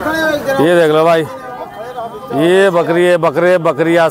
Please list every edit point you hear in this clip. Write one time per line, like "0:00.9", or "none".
none